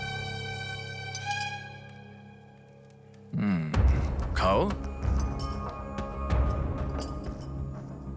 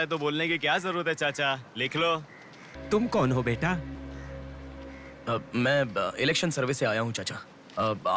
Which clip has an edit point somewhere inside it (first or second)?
second